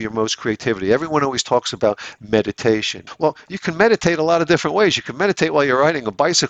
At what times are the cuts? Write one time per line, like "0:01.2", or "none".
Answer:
0:03.0